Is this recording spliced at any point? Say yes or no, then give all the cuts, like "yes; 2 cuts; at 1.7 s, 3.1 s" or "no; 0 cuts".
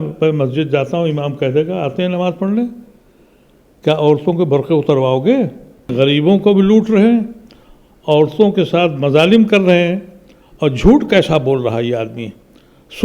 yes; 1 cut; at 5.9 s